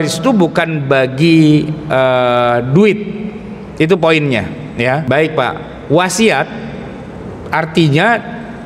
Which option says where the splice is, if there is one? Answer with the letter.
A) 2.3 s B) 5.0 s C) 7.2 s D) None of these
B